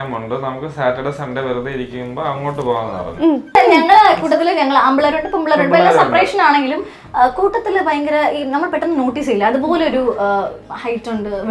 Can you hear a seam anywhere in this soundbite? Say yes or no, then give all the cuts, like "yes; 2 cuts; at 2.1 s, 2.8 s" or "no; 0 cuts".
yes; 1 cut; at 3.5 s